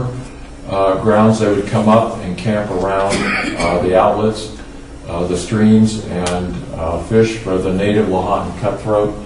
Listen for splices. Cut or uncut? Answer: uncut